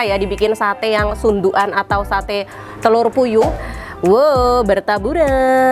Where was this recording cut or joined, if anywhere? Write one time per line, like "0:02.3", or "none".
0:03.7